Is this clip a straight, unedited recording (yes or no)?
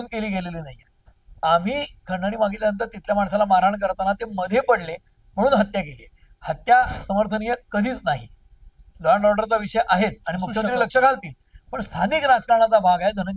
yes